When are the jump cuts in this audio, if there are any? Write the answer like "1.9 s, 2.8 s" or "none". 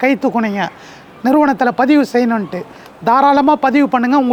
none